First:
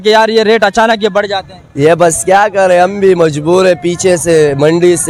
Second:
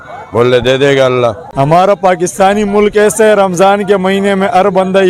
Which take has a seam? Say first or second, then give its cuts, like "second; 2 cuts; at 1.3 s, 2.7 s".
second; 1 cut; at 1.4 s